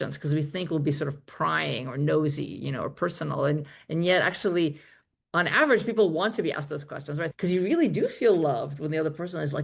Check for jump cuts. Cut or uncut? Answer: cut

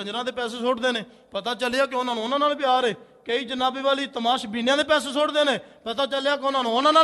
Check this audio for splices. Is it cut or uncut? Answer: uncut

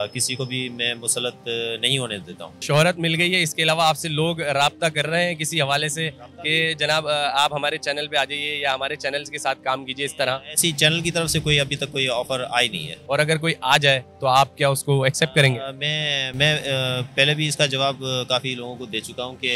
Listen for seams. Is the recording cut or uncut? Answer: cut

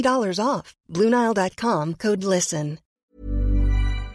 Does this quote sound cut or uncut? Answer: cut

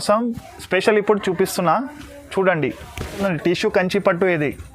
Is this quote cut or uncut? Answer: cut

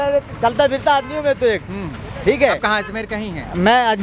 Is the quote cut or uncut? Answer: uncut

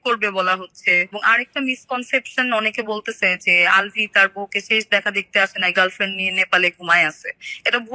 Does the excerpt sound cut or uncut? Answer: cut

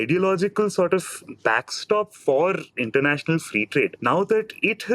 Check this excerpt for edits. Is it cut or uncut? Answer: uncut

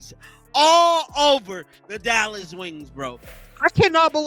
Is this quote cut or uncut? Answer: cut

